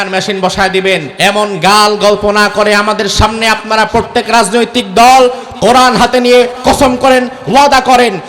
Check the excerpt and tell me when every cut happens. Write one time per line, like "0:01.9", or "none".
0:01.1

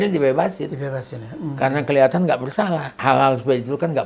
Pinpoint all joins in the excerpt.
0:02.9

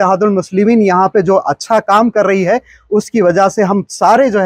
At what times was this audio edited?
none

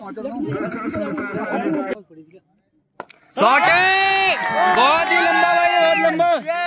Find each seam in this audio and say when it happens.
0:01.9

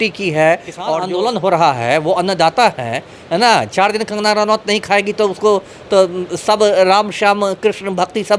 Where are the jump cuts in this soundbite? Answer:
0:01.0

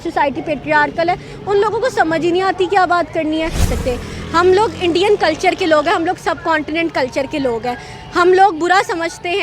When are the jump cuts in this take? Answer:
0:03.7

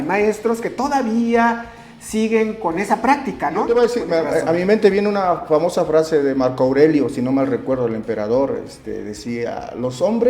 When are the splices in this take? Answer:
0:03.6

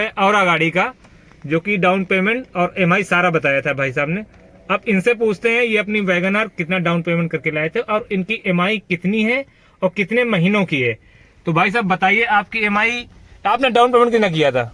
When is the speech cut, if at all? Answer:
none

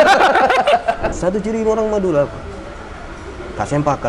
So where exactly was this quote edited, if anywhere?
0:01.1

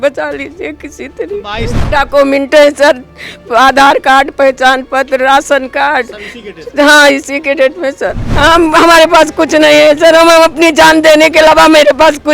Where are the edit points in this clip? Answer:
0:01.7
0:08.2

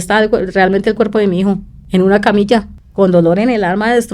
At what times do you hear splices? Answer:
0:01.7
0:02.8

